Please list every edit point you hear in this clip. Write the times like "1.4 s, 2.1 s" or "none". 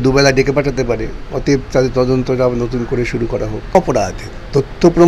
3.8 s